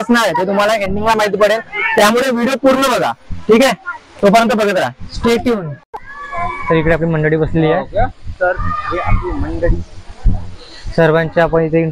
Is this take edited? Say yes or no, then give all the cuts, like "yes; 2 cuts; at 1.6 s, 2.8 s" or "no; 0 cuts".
no; 0 cuts